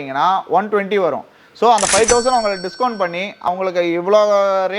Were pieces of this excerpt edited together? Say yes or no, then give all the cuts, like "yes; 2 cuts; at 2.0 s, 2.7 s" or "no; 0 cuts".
yes; 1 cut; at 3.5 s